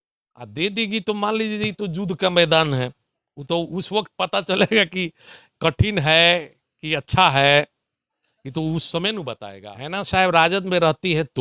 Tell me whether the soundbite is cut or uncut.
cut